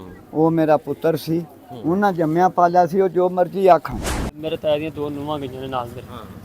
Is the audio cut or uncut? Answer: cut